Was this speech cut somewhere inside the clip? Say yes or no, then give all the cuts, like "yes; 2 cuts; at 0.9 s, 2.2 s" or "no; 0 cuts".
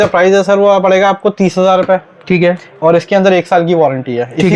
no; 0 cuts